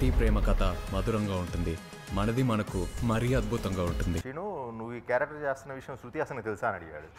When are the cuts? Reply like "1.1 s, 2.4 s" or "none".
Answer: 4.2 s